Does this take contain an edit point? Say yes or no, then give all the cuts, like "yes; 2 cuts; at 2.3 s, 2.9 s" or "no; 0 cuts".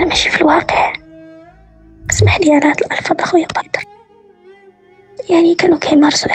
yes; 1 cut; at 3.8 s